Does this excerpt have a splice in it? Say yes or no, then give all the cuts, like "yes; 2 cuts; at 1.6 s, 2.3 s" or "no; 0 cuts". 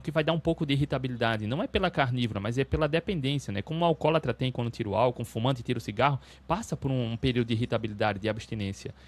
no; 0 cuts